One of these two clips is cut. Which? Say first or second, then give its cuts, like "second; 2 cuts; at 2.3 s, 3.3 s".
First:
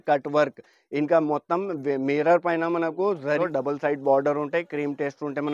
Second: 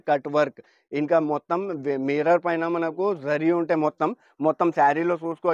first; 1 cut; at 3.4 s